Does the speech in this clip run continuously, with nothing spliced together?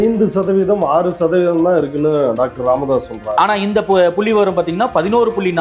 yes; 0 cuts

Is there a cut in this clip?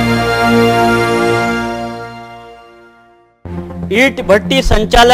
yes; 1 cut; at 3.9 s

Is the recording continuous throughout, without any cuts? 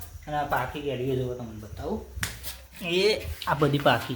yes; 0 cuts

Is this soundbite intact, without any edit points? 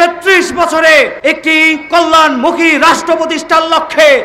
no; 1 cut; at 1.1 s

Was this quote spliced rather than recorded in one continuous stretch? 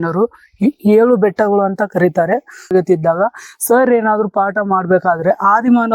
yes; 1 cut; at 2.7 s

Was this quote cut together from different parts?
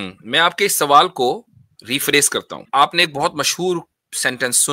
yes; 1 cut; at 2.6 s

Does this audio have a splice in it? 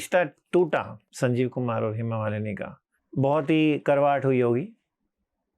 yes; 1 cut; at 1.0 s

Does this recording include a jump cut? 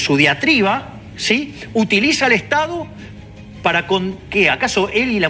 no; 0 cuts

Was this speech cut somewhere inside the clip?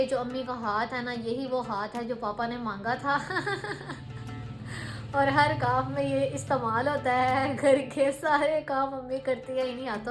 no; 0 cuts

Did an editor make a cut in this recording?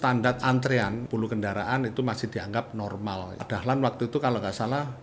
yes; 2 cuts; at 1.0 s, 3.4 s

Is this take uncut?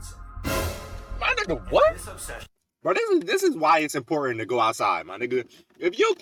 yes; 0 cuts

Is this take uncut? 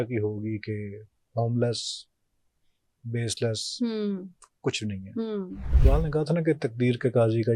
no; 1 cut; at 5.7 s

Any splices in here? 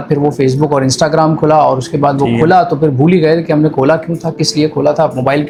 no; 0 cuts

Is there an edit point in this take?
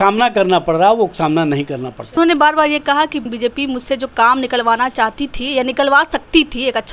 yes; 2 cuts; at 2.2 s, 3.3 s

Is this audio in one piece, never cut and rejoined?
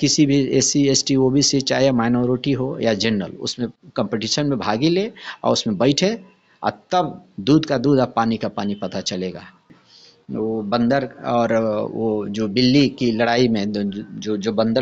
no; 1 cut; at 9.7 s

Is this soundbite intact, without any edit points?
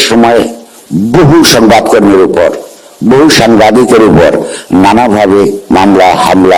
yes; 0 cuts

